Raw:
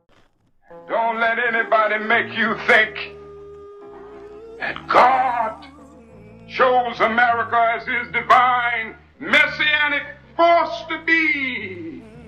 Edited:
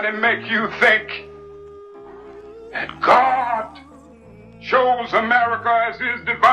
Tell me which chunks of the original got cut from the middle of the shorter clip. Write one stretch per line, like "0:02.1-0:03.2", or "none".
none